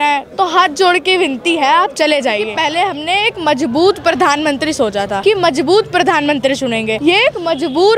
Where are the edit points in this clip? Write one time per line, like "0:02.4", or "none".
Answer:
0:02.5
0:05.1
0:07.0